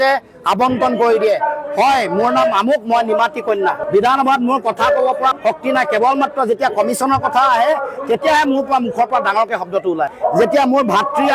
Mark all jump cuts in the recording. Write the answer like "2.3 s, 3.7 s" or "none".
none